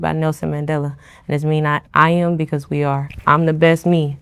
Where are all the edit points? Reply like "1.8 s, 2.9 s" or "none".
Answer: 1.8 s, 3.1 s